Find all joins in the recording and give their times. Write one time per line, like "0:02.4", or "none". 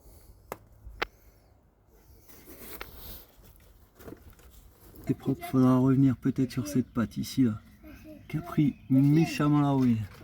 0:05.0

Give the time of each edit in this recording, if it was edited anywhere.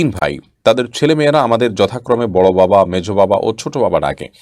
none

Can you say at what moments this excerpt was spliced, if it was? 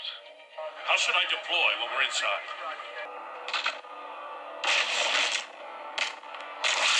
0:03.1

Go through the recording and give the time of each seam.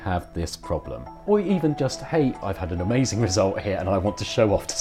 0:01.1
0:02.4

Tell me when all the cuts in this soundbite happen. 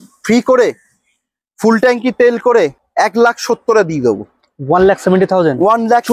0:02.8

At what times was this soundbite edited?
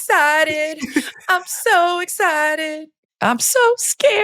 0:02.9

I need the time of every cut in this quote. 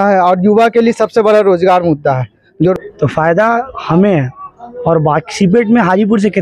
0:02.7

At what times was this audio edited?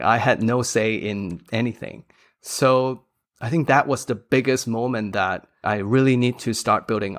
0:05.6

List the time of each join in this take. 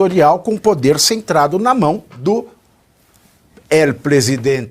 0:02.1

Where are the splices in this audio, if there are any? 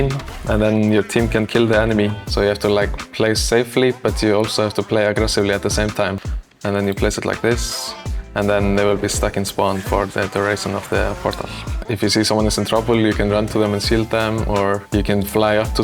0:02.2
0:06.2
0:11.8

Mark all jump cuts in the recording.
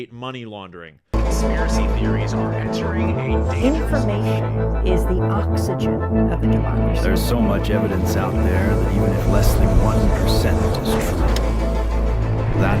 0:01.0

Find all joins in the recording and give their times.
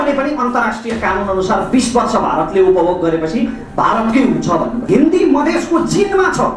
0:04.9

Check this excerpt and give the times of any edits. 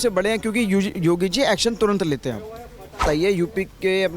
0:03.0

